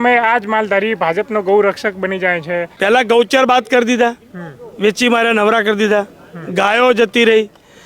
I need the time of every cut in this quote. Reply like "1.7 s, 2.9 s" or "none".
2.7 s